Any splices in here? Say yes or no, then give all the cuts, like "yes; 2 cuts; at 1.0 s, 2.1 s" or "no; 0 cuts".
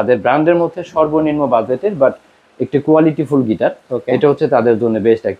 no; 0 cuts